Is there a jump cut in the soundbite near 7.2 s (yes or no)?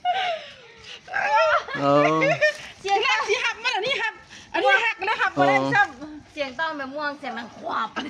no